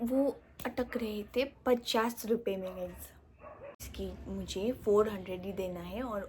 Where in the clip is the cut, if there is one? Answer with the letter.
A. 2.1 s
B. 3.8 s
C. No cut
B